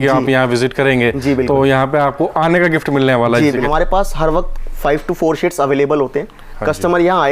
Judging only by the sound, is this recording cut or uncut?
cut